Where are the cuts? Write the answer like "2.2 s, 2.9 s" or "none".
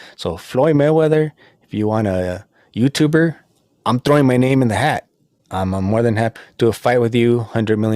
6.3 s

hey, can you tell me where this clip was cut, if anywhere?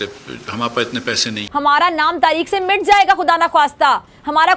1.3 s

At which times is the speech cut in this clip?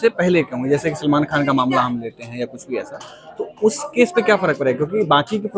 none

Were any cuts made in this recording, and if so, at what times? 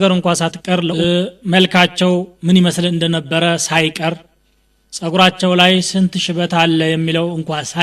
0.9 s

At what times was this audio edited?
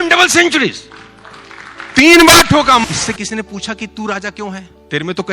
2.8 s

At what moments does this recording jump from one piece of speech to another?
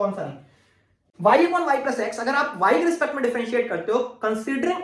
1.1 s

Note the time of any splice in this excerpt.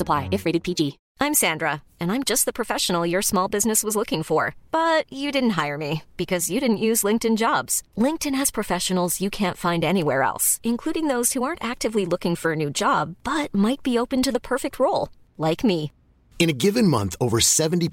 1.0 s

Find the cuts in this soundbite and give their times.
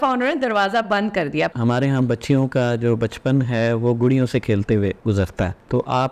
1.5 s, 5.1 s

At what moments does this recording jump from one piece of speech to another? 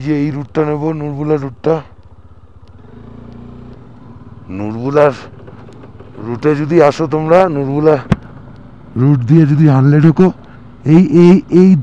3.8 s

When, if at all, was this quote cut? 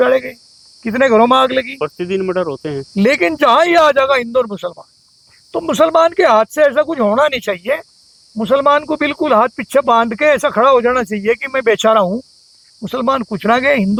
none

